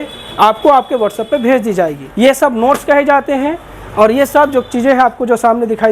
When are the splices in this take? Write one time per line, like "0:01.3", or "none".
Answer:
0:02.0